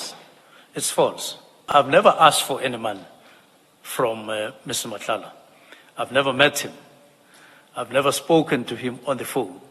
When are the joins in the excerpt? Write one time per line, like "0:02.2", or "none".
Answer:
0:01.6